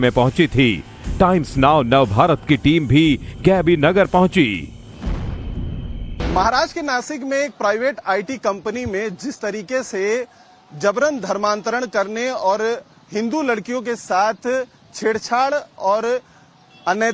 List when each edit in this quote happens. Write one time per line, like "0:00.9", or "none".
none

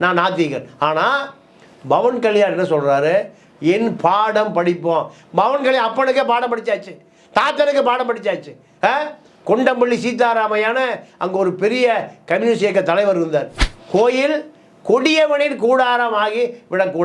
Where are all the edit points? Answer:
0:13.6

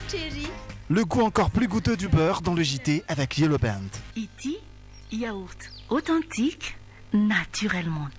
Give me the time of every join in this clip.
0:04.1

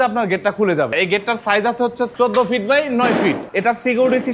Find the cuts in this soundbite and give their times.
0:00.9
0:02.1
0:03.5

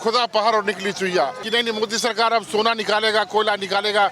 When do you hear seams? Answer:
0:01.4

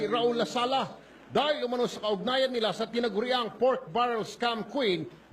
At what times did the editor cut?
0:02.9

